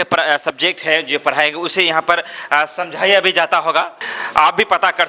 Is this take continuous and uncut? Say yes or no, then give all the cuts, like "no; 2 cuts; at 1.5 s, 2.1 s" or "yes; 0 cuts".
no; 1 cut; at 4.0 s